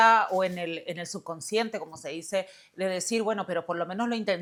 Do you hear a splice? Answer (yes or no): no